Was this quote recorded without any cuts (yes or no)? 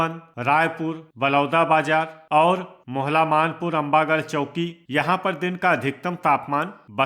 no